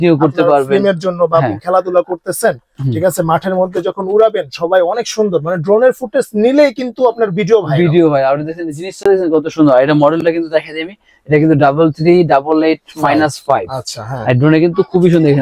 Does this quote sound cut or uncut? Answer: uncut